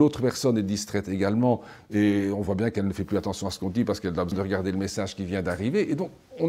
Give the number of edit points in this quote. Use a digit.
1